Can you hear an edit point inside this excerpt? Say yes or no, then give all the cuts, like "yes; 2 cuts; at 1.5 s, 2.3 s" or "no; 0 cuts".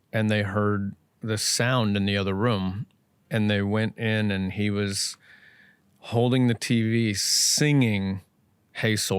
no; 0 cuts